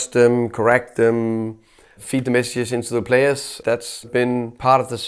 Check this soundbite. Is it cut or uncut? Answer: cut